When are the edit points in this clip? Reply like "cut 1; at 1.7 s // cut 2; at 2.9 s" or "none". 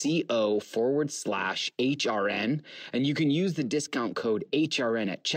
none